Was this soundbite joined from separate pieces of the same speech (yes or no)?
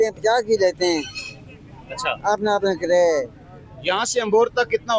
no